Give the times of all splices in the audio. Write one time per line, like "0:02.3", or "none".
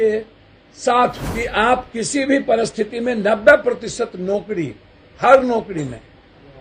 0:01.2